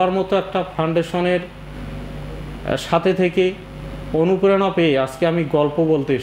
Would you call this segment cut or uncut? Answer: uncut